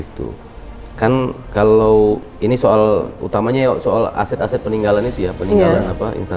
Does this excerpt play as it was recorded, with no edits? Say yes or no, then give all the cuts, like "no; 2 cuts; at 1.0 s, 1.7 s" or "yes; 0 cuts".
yes; 0 cuts